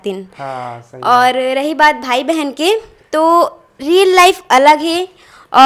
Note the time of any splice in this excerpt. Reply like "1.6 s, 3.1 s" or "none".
none